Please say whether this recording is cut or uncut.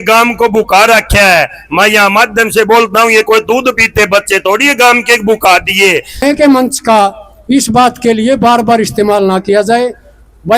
cut